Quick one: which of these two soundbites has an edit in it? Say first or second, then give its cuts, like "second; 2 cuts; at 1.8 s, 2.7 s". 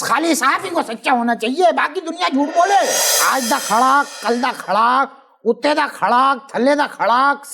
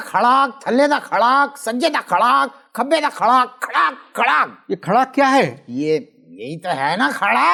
first; 1 cut; at 3.1 s